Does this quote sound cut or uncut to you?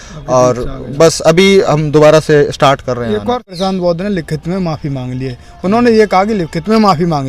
cut